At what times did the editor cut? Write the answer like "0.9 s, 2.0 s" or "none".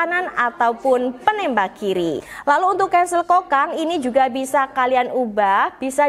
2.3 s